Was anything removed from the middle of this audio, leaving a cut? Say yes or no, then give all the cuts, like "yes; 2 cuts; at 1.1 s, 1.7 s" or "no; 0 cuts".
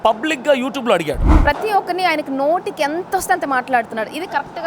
yes; 1 cut; at 1.3 s